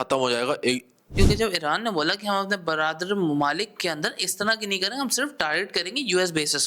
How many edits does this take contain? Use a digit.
1